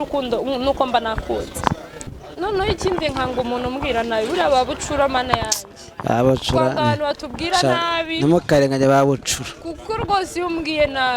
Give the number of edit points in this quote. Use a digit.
1